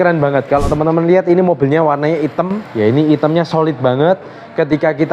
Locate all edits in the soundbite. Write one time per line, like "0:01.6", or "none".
0:02.6